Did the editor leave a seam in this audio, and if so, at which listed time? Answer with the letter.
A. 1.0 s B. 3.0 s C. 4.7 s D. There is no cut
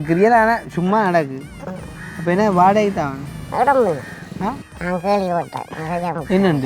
C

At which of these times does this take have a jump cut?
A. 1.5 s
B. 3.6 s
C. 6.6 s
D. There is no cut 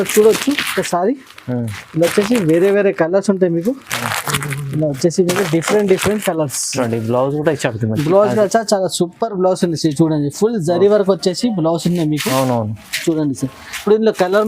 C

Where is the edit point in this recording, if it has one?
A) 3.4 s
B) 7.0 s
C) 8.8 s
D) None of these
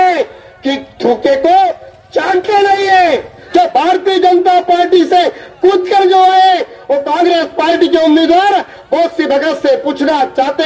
A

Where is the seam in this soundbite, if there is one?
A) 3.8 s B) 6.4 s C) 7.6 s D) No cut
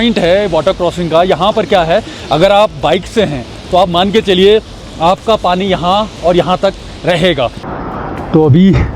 C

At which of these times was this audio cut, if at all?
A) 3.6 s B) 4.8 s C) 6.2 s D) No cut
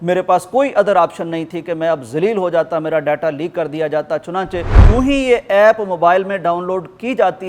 B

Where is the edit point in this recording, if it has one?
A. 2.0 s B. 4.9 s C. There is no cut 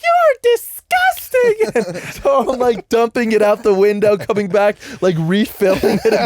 A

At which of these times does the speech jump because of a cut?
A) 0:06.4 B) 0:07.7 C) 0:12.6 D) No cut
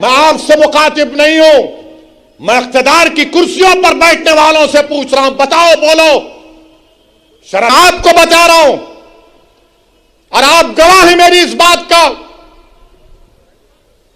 B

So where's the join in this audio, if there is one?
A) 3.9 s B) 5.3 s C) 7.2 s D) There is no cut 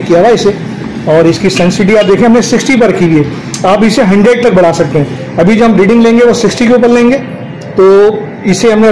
D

